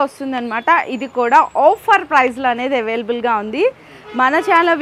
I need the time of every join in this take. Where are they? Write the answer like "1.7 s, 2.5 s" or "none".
none